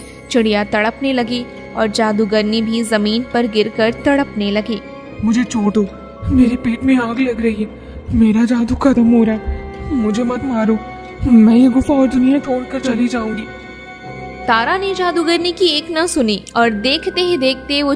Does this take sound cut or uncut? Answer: uncut